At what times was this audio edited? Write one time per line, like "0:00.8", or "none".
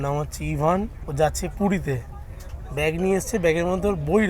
0:01.0